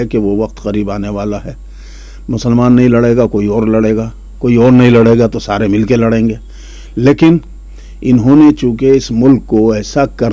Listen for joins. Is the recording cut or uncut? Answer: uncut